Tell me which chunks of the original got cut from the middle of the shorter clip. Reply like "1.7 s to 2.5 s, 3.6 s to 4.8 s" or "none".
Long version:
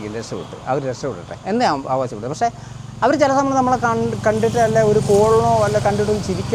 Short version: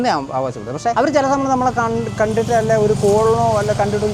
2.5 s to 3.0 s